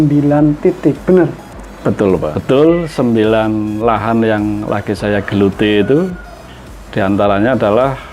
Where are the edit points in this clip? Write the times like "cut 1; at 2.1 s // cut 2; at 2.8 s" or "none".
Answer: cut 1; at 2.4 s